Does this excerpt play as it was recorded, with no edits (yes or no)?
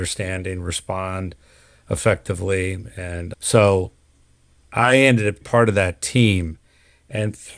no